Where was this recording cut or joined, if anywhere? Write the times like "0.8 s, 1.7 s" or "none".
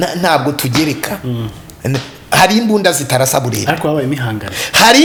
none